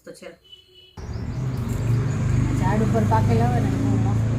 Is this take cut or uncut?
cut